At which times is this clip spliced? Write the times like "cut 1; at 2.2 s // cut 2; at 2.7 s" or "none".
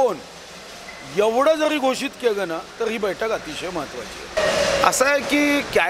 cut 1; at 4.4 s